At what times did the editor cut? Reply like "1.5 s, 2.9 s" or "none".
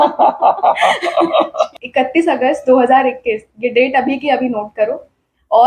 1.7 s